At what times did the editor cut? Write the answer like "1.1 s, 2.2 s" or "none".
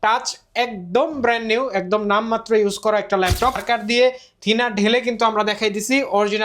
3.6 s